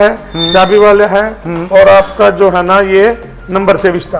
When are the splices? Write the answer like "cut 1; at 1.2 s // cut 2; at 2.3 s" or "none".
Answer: none